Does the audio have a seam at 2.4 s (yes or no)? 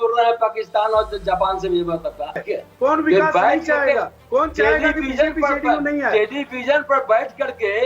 yes